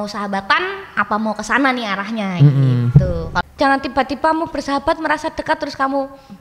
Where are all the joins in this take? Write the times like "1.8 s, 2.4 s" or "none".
3.3 s